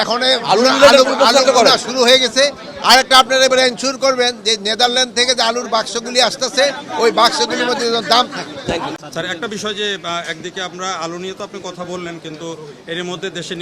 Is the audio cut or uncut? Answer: cut